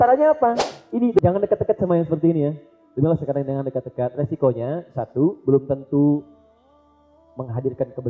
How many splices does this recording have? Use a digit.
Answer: 1